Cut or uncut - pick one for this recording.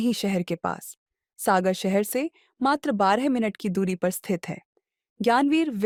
uncut